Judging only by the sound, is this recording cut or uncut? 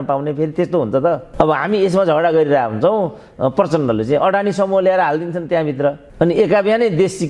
cut